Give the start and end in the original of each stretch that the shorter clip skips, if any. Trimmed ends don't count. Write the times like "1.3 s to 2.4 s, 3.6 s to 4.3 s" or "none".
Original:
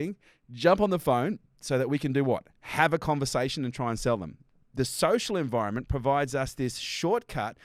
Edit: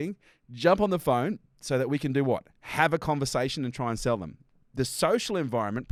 none